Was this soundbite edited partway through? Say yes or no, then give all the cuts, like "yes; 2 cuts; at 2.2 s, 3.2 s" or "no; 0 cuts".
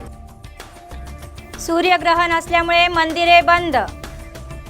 yes; 1 cut; at 1.0 s